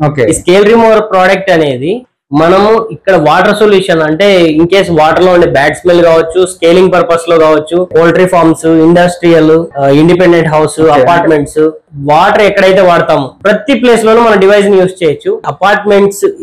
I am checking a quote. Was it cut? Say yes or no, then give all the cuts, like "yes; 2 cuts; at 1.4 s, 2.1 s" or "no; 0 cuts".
yes; 5 cuts; at 7.9 s, 9.7 s, 11.8 s, 13.3 s, 15.4 s